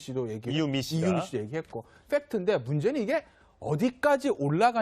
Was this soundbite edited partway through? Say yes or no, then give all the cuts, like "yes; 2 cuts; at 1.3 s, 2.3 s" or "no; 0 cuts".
yes; 1 cut; at 3.7 s